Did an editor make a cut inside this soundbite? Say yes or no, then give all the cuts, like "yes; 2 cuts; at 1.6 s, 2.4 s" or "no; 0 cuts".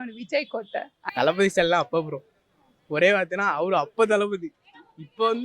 yes; 1 cut; at 1.0 s